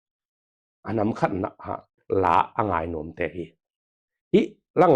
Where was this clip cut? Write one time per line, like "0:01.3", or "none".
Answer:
0:02.0